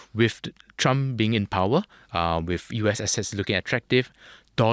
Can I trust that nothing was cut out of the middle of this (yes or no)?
yes